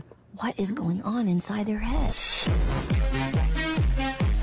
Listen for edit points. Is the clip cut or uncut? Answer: uncut